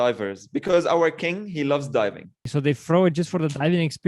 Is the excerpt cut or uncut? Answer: cut